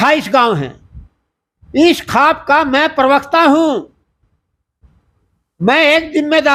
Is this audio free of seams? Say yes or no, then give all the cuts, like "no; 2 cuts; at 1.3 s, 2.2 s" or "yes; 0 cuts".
yes; 0 cuts